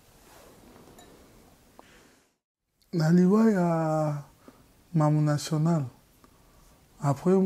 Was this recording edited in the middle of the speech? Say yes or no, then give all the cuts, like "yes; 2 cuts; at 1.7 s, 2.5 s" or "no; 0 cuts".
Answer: yes; 1 cut; at 2.2 s